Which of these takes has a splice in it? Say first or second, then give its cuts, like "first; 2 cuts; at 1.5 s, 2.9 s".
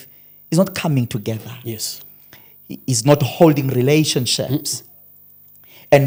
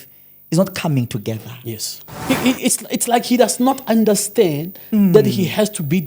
second; 1 cut; at 2.2 s